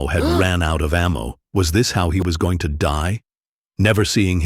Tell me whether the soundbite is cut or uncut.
cut